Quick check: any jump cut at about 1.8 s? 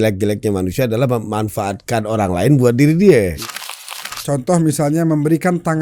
no; 1 cut; at 3.8 s

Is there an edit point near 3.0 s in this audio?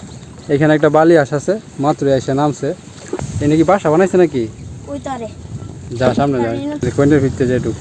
yes; 2 cuts; at 3.0 s, 6.8 s

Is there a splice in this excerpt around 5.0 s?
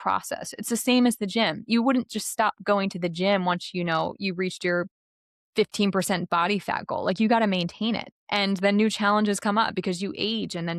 no; 0 cuts

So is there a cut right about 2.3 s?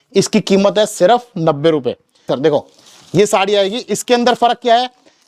yes; 1 cut; at 2.3 s

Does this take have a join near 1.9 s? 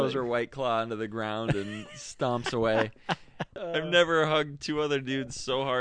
no; 1 cut; at 3.6 s

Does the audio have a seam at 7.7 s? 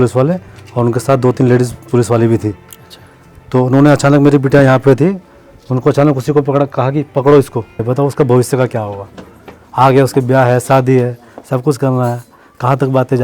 yes; 1 cut; at 7.7 s

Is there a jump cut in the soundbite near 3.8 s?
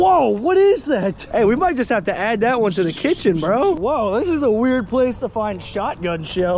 yes; 2 cuts; at 1.2 s, 3.8 s

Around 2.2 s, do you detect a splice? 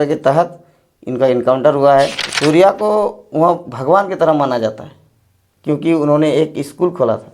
yes; 1 cut; at 2.2 s

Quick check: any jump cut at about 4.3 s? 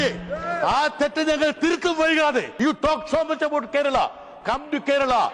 no; 1 cut; at 2.5 s

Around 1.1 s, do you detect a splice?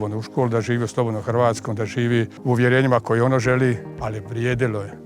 no; 2 cuts; at 2.3 s, 3.9 s

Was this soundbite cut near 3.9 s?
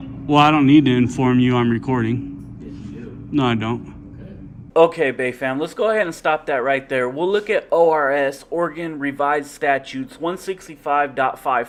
no; 0 cuts

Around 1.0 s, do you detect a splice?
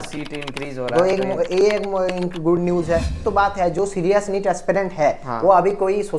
no; 1 cut; at 3.2 s

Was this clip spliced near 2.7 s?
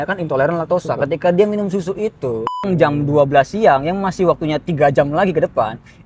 yes; 1 cut; at 2.7 s

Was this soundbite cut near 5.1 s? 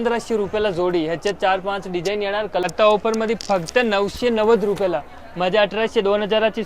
no; 1 cut; at 2.6 s

